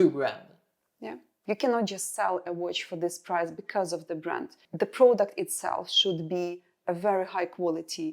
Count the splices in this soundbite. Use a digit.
2